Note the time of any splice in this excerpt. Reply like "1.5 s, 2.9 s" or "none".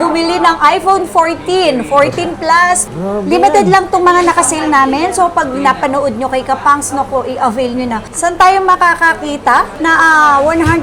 2.8 s, 8.0 s